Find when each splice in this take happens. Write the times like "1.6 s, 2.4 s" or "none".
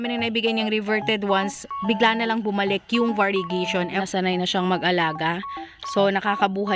3.9 s